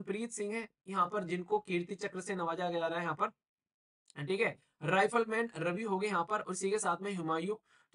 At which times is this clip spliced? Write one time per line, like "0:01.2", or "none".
none